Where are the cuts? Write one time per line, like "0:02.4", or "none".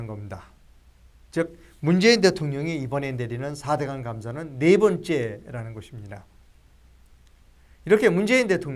none